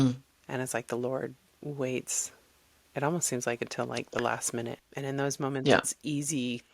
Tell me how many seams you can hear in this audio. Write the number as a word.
one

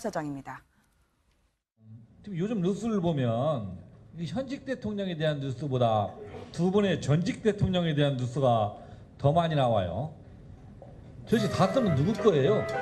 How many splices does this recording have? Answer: zero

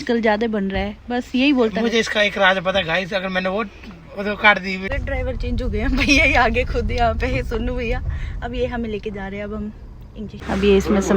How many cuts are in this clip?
two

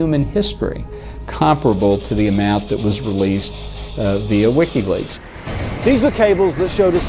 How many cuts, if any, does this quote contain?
zero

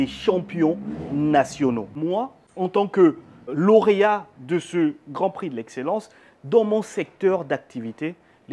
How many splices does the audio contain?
two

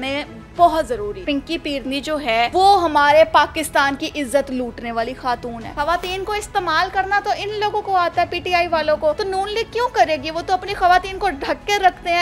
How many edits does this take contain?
four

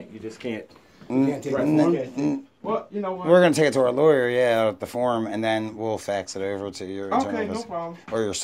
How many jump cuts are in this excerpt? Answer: zero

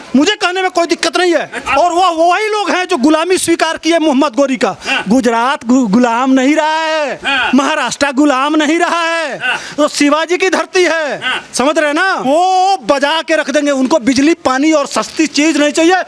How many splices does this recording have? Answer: three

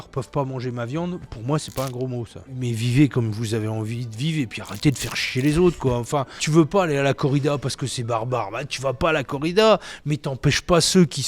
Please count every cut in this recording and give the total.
two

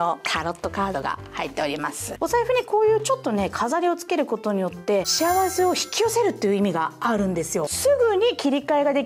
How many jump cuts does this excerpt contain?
three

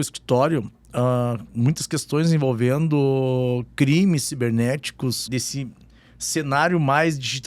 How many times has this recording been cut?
one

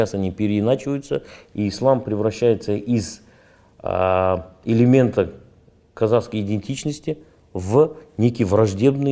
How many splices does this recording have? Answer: zero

